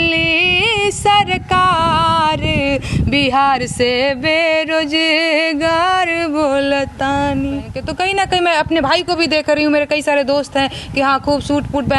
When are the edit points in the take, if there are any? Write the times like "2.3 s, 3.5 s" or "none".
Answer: 7.8 s